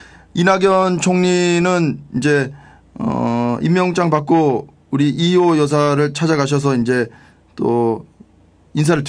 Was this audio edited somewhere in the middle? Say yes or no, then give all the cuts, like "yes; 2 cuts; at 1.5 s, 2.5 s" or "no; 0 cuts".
yes; 1 cut; at 7.7 s